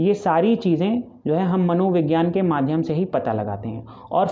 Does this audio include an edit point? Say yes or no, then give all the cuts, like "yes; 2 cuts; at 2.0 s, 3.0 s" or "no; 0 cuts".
no; 0 cuts